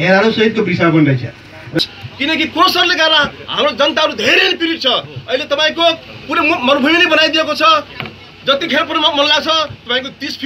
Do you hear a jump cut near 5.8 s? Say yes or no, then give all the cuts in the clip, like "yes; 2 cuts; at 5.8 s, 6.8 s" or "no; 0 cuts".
no; 1 cut; at 1.8 s